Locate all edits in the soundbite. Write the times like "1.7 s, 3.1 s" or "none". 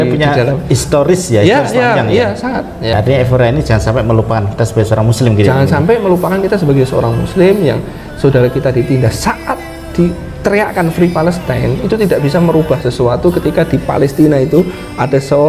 2.9 s